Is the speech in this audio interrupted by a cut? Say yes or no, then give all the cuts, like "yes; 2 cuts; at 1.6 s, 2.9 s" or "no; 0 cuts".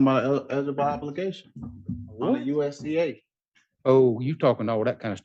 no; 0 cuts